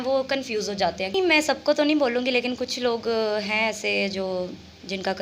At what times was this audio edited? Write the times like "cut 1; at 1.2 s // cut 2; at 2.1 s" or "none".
cut 1; at 1.1 s